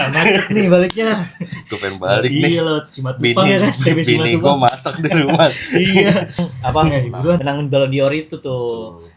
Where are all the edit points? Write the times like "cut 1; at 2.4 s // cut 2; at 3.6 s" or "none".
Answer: cut 1; at 7.4 s